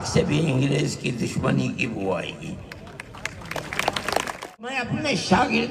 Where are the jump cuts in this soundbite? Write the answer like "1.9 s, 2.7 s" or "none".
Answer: 4.7 s